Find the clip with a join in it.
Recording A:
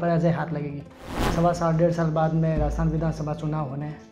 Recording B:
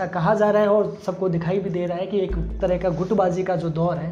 A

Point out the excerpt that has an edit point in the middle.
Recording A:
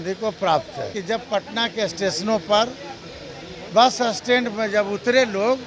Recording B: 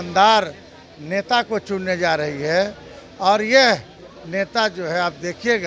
A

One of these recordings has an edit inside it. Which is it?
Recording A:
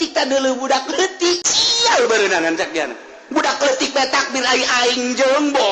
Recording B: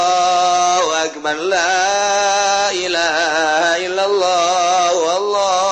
A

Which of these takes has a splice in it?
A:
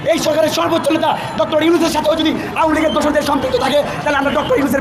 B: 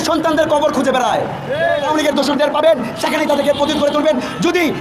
B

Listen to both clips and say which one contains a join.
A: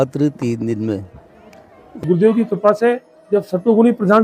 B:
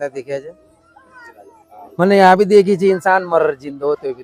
A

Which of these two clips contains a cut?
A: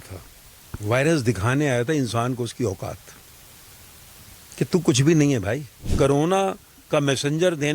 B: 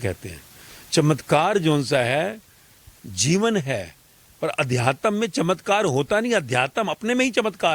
A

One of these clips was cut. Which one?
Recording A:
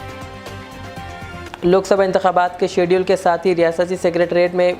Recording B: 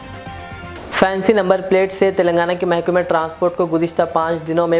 A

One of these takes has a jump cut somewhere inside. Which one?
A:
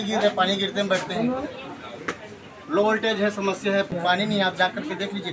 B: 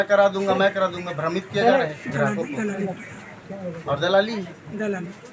A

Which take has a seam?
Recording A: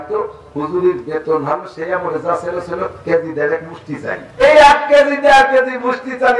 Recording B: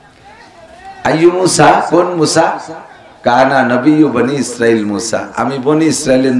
A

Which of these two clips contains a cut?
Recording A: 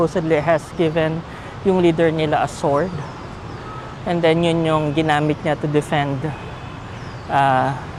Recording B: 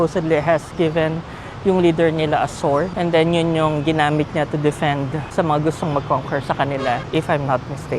B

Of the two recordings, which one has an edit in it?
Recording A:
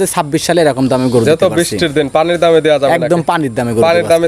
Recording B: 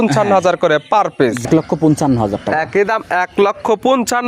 B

